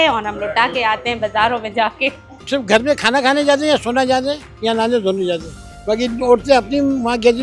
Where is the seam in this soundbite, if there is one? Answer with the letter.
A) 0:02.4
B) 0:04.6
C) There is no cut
A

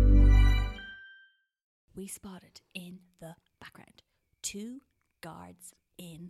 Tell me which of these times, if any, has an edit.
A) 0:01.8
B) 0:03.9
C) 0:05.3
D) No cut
A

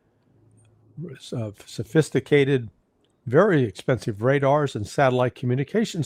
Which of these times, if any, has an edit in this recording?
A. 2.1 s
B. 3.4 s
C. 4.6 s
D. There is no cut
D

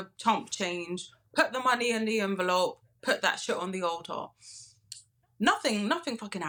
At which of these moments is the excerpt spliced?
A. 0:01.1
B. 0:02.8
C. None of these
C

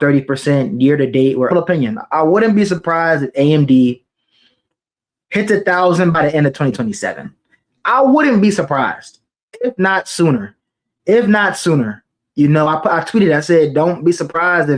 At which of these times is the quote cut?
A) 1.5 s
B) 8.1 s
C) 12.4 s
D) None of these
A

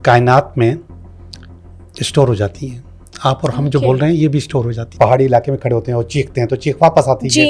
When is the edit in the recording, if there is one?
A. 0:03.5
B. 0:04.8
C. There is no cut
B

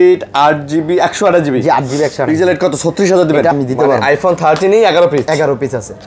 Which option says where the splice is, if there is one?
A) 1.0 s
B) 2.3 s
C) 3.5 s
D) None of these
C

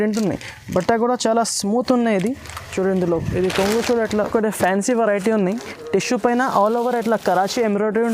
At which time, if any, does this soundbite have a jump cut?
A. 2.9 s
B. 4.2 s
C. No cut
B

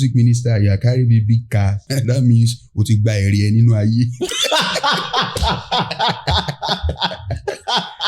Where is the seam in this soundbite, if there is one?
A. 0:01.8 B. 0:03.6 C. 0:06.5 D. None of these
A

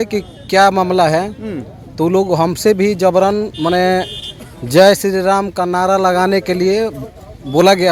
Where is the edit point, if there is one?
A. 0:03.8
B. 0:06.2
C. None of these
C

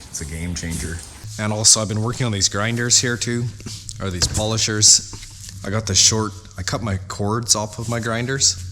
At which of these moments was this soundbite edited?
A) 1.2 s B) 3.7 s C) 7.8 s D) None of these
A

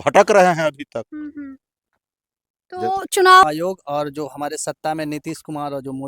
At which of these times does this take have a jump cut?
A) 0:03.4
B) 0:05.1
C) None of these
A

